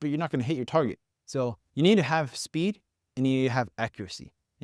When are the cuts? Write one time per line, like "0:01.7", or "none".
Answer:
none